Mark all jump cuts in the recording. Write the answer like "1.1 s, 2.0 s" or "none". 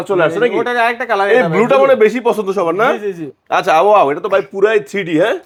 none